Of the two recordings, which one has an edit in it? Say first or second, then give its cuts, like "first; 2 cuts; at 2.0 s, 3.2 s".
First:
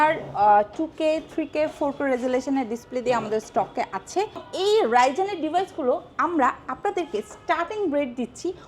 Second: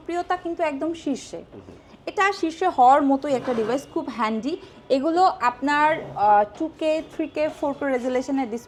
first; 1 cut; at 4.5 s